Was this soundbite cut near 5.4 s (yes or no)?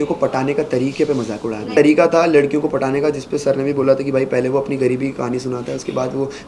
no